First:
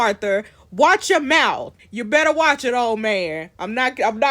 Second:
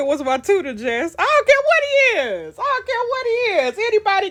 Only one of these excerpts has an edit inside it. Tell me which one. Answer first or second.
first